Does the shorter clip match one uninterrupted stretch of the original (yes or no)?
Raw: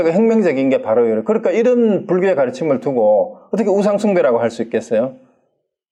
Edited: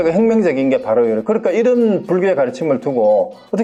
yes